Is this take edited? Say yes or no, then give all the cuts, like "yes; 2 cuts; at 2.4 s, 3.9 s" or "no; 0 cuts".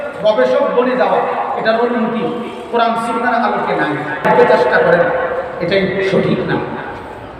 yes; 1 cut; at 4.3 s